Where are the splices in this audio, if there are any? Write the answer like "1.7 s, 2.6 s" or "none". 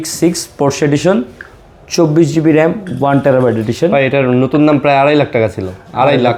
none